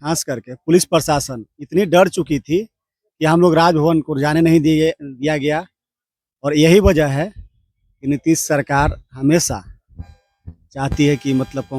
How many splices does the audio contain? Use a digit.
0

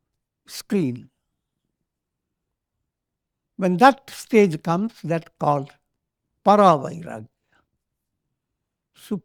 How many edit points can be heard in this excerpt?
0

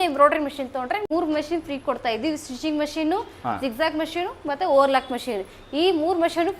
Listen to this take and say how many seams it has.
1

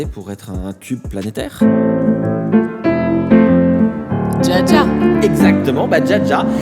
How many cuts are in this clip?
1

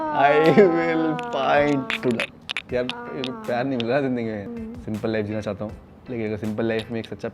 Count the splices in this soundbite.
1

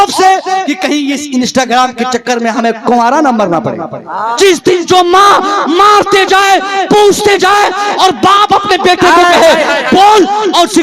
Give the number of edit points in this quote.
1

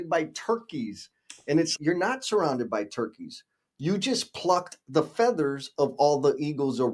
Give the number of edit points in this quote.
0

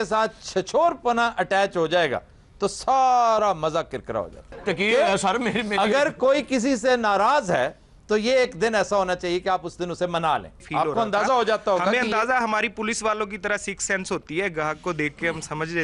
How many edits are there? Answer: 2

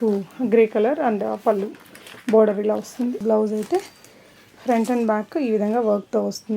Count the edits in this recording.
1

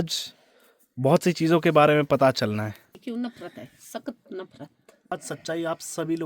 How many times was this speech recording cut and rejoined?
2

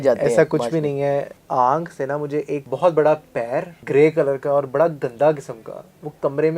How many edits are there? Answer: 3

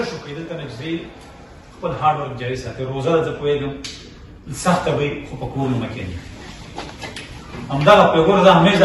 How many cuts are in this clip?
0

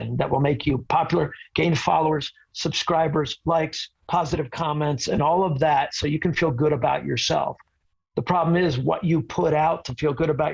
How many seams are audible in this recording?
0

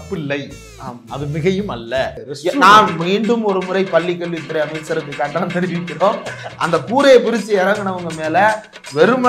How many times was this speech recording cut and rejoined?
1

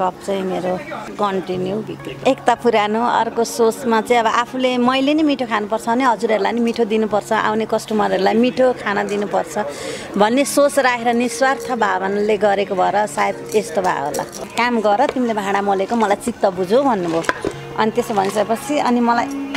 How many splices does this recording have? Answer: 3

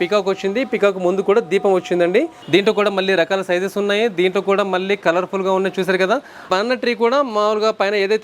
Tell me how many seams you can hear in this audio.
2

